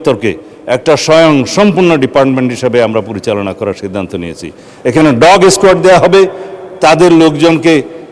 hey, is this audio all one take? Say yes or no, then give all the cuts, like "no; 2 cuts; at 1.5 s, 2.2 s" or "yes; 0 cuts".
yes; 0 cuts